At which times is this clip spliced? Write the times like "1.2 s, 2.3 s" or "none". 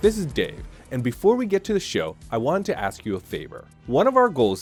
none